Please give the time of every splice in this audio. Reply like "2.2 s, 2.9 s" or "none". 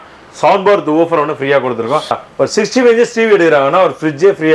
2.2 s